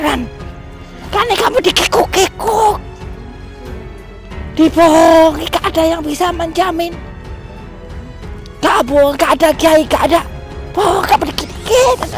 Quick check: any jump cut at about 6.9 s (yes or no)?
yes